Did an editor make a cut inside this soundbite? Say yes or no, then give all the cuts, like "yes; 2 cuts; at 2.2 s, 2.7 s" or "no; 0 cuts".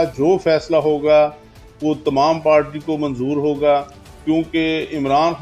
no; 0 cuts